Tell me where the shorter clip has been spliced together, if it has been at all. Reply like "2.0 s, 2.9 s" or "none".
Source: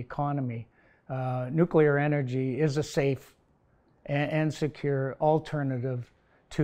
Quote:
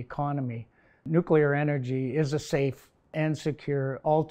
1.0 s, 3.1 s